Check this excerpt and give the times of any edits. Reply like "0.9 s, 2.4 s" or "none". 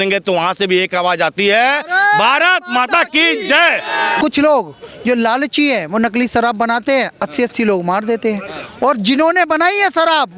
4.2 s